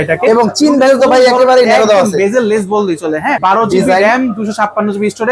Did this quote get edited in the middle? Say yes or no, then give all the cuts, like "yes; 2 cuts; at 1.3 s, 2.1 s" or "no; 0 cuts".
yes; 1 cut; at 3.4 s